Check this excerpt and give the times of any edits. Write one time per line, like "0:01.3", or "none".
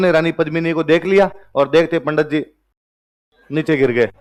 none